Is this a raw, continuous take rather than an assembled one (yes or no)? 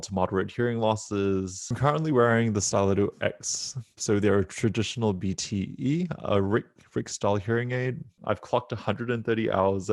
no